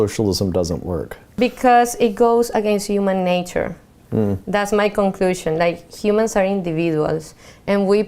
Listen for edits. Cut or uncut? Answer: cut